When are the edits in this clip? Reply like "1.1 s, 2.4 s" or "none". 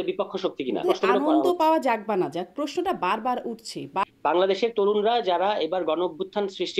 0.8 s, 4.0 s